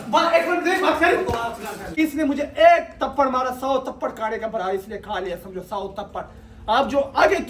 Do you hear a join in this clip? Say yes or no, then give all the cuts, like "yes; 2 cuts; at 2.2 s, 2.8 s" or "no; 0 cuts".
yes; 1 cut; at 2.0 s